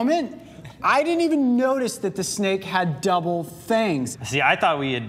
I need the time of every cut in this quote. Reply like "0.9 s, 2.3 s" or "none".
4.1 s